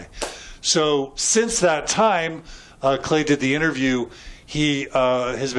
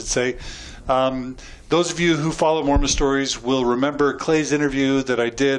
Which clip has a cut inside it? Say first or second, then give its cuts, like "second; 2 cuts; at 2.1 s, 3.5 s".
first; 1 cut; at 3.5 s